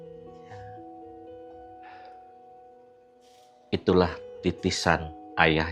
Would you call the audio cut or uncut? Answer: uncut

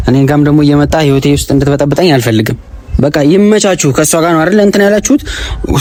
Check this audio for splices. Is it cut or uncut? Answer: uncut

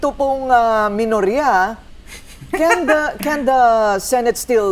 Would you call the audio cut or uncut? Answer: uncut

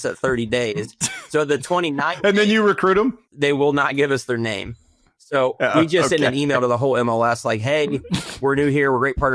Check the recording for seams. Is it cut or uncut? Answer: cut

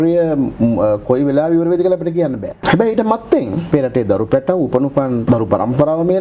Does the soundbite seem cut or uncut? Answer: cut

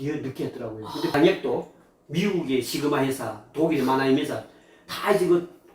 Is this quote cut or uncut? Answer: cut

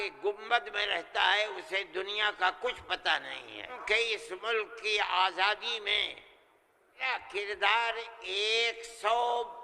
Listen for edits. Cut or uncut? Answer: cut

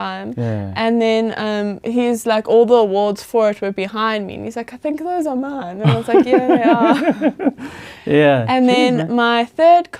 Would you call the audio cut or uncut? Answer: uncut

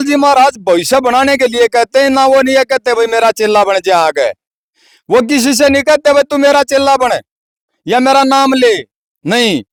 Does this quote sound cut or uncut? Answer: uncut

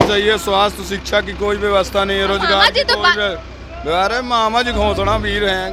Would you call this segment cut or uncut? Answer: uncut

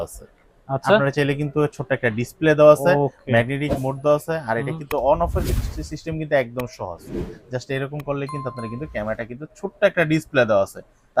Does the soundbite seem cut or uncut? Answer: uncut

